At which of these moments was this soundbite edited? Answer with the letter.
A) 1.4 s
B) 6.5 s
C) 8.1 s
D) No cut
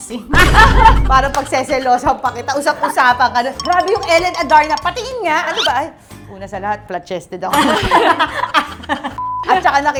D